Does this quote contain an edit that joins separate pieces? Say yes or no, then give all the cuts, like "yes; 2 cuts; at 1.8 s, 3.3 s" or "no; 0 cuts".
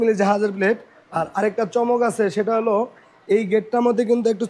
no; 0 cuts